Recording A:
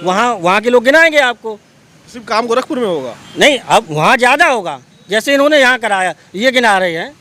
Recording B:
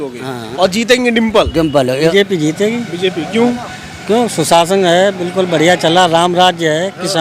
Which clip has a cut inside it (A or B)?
B